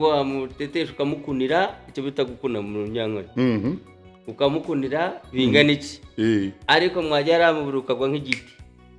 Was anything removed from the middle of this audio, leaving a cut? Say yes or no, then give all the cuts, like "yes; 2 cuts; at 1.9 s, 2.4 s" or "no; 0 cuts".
no; 0 cuts